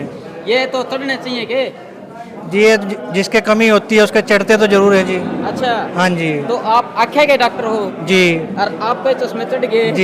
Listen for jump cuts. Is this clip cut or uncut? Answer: uncut